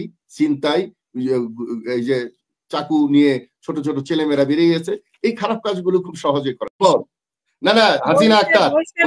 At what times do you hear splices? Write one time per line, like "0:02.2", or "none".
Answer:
0:06.8

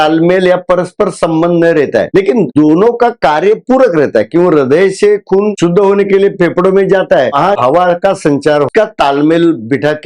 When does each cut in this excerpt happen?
0:07.4
0:08.7

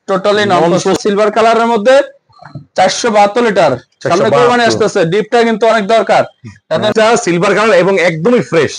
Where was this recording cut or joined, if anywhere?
0:01.0
0:06.9

